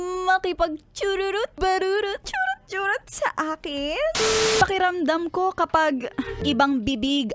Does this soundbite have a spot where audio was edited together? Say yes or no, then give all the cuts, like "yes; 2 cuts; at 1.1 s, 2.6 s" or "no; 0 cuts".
yes; 4 cuts; at 1.5 s, 2.2 s, 4.5 s, 6.4 s